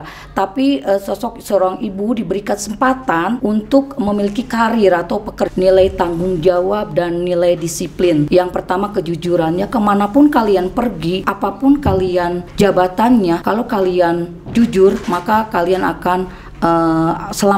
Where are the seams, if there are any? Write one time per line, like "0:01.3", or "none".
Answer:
0:03.4
0:05.4
0:08.3
0:11.3
0:12.4
0:13.4
0:15.0